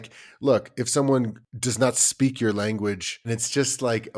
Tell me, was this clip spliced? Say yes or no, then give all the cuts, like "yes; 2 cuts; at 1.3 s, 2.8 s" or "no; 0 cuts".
yes; 2 cuts; at 1.4 s, 3.3 s